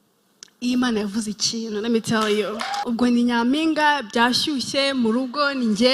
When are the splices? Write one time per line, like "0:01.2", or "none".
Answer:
0:02.8